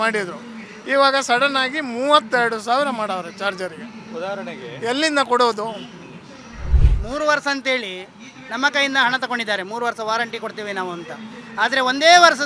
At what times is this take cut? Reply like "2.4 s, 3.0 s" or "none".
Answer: none